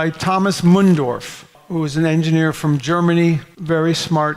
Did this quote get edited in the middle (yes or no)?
no